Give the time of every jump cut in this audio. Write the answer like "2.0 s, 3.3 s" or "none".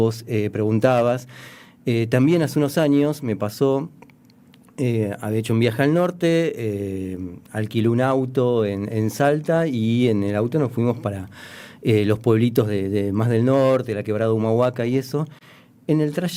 none